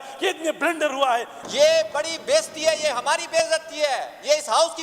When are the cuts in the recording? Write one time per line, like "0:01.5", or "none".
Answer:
0:01.4

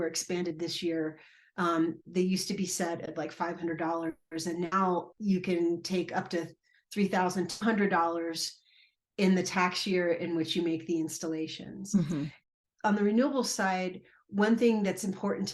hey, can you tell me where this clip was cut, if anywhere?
0:12.5

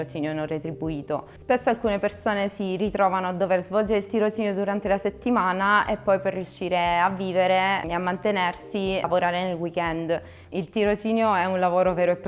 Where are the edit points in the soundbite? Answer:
0:10.5

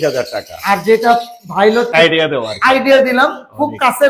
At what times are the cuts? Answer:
0:01.9

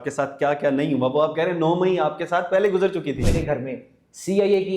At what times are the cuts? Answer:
0:03.3

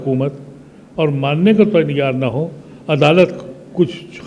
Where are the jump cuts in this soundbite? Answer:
none

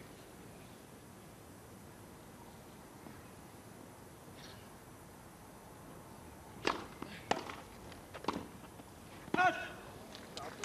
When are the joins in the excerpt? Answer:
0:01.5

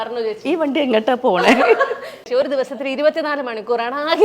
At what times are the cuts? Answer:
0:02.3

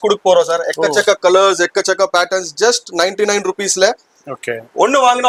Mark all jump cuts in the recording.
none

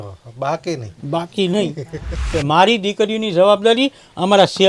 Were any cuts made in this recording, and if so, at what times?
0:02.2

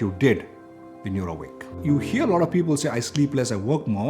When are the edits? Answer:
0:01.8

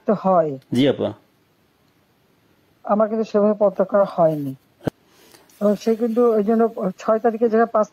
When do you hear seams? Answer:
0:04.9

